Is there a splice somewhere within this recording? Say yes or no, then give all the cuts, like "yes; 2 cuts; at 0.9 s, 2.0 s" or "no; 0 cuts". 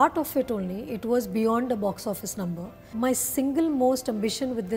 yes; 1 cut; at 2.8 s